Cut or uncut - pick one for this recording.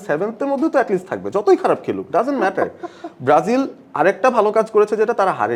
uncut